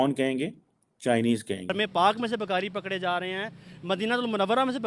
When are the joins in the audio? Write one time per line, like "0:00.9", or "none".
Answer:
0:01.7